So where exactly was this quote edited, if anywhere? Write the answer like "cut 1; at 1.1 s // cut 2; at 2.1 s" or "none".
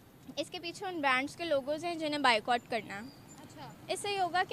none

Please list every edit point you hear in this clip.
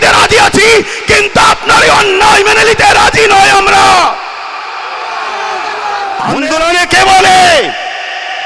cut 1; at 6.4 s

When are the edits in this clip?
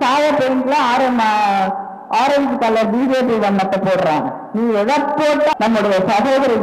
cut 1; at 5.5 s

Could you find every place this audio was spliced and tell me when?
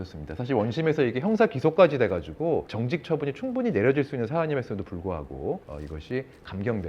cut 1; at 2.7 s // cut 2; at 5.7 s

